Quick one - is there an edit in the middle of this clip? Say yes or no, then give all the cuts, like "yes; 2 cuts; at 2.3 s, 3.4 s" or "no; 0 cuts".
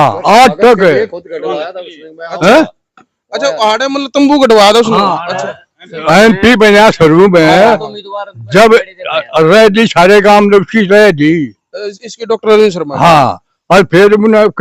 no; 0 cuts